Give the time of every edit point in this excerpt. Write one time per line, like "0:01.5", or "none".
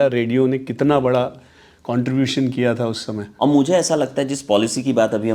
none